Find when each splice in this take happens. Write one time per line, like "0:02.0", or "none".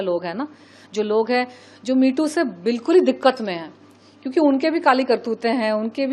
none